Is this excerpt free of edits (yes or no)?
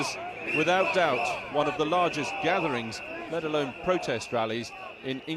yes